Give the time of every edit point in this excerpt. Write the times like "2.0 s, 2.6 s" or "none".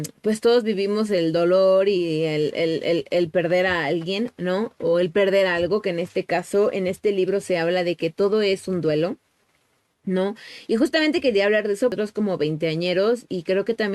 11.9 s